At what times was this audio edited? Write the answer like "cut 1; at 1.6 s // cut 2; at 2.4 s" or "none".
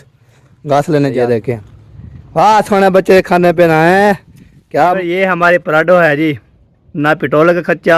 cut 1; at 1.4 s // cut 2; at 5.0 s